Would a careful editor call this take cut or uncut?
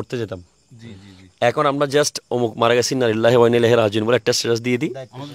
uncut